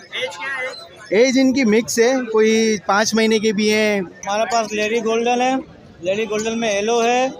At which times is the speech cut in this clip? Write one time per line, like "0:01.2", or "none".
0:04.1